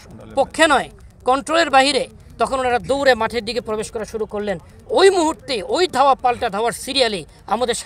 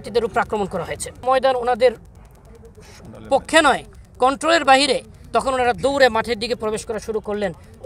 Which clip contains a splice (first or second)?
second